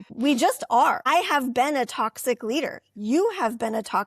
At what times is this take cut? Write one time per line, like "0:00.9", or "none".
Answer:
0:01.0